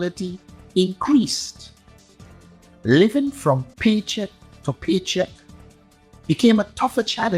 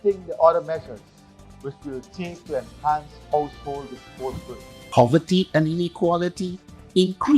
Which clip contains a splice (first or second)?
second